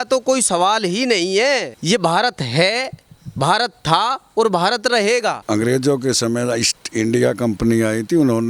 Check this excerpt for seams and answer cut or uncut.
cut